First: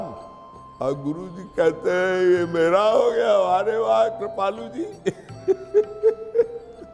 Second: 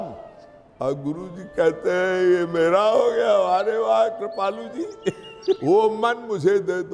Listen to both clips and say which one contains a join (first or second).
second